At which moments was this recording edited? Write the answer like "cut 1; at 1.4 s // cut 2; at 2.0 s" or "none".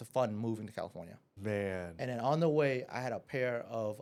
none